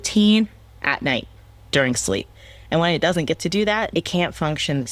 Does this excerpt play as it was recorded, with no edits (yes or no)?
no